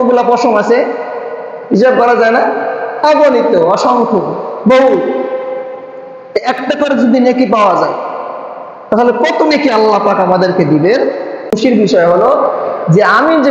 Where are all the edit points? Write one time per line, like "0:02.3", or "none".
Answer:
0:11.5